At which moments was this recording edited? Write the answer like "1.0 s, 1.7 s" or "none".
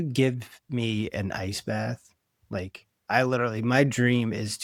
none